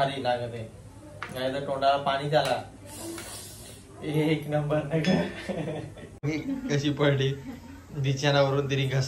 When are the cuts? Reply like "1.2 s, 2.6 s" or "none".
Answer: 6.2 s

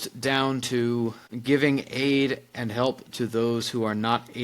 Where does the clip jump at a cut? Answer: 1.3 s

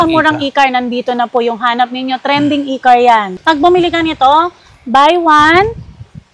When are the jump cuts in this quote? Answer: 3.3 s

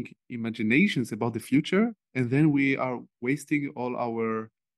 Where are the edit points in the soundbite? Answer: none

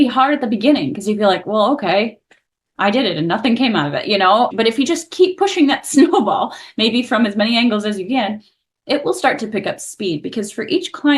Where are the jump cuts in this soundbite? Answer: 4.5 s

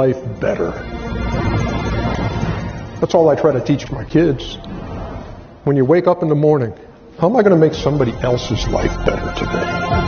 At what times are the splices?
3.9 s

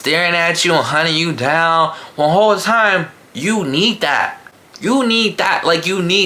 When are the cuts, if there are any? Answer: none

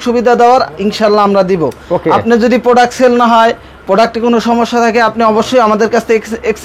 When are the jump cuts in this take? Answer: none

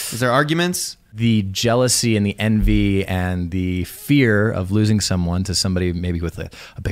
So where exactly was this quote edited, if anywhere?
1.1 s

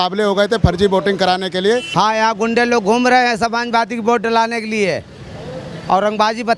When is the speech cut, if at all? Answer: 1.9 s

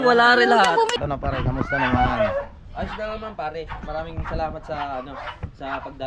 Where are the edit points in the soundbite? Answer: 0.9 s

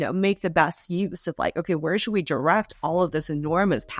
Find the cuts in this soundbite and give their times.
none

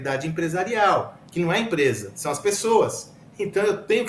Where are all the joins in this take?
none

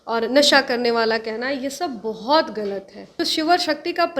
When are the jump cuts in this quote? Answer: 3.2 s

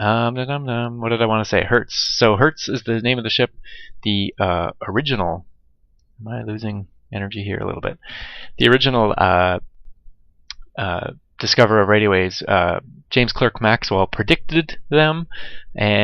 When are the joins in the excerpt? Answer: 14.8 s

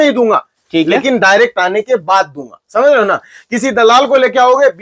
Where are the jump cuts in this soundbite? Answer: none

